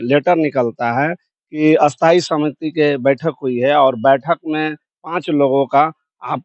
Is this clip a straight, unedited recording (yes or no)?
yes